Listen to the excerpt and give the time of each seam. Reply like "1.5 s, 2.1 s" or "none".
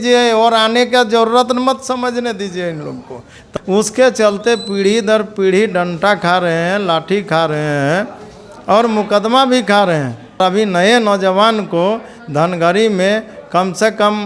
3.4 s, 10.4 s